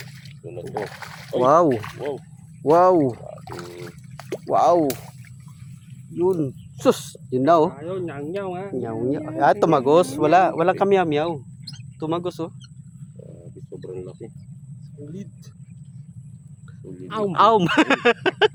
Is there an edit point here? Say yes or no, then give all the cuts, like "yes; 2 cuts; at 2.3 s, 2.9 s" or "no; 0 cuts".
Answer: no; 0 cuts